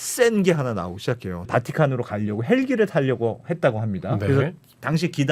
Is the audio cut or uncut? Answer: cut